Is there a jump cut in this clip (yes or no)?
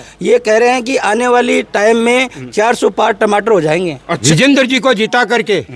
yes